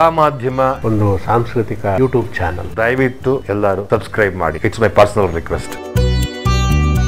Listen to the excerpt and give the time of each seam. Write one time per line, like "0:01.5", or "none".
0:04.6
0:05.7